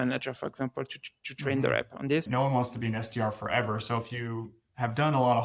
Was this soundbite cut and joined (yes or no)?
yes